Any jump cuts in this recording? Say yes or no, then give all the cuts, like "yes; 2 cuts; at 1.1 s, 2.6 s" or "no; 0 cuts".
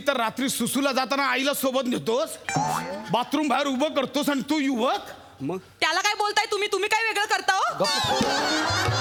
no; 0 cuts